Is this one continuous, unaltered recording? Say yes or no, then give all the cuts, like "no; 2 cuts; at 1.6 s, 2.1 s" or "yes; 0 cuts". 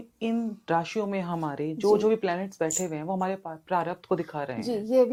yes; 0 cuts